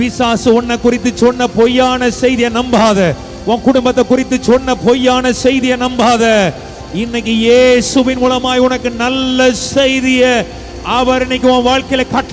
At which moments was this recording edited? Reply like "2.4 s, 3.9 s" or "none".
none